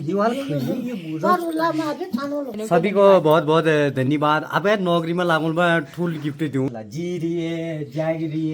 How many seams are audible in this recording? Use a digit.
2